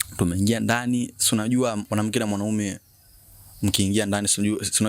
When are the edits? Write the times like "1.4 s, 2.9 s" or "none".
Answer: 1.8 s